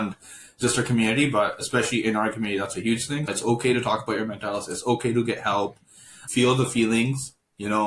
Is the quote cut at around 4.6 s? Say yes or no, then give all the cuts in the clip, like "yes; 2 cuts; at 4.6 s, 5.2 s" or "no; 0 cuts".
no; 2 cuts; at 3.3 s, 6.2 s